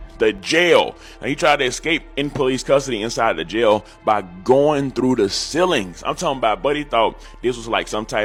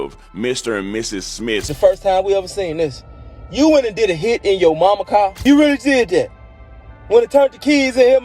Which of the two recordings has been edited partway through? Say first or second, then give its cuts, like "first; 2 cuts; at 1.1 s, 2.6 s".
second; 2 cuts; at 1.7 s, 5.5 s